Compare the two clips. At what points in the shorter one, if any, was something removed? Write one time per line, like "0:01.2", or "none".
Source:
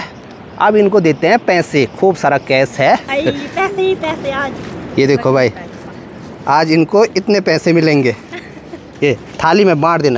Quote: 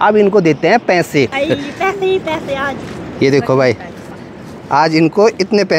0:01.3